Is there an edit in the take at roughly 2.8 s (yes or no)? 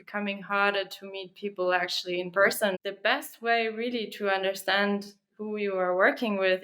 yes